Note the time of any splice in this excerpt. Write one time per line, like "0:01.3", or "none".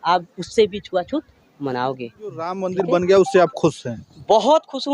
0:02.6